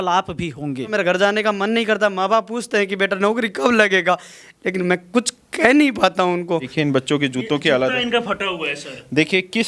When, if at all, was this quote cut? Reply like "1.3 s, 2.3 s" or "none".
0.9 s, 6.7 s